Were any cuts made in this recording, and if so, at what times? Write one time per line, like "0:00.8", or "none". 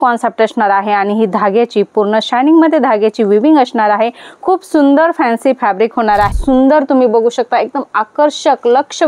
0:06.3